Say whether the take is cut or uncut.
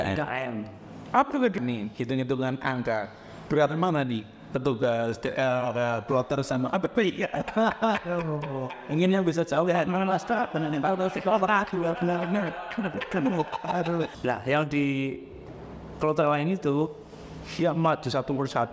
cut